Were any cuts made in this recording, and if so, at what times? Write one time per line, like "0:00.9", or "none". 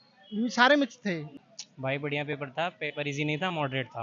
0:01.3